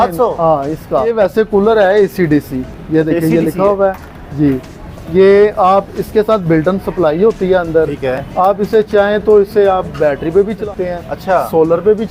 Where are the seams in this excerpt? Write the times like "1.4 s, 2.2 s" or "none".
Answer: 1.1 s, 10.6 s